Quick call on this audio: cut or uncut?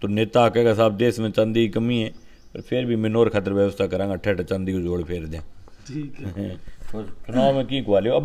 uncut